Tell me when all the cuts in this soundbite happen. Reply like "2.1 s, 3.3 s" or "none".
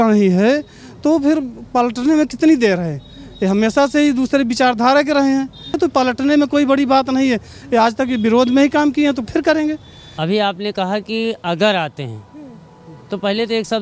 5.7 s, 10.1 s